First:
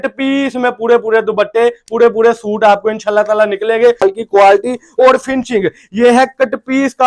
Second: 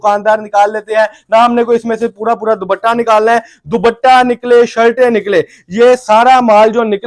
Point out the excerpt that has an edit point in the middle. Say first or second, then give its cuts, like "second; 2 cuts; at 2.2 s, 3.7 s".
first; 1 cut; at 4.0 s